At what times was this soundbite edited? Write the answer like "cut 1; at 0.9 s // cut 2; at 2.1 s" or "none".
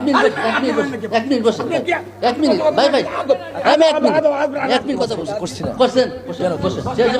cut 1; at 5.2 s